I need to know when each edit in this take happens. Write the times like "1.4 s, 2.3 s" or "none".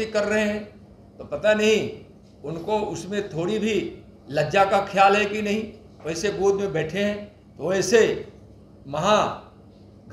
none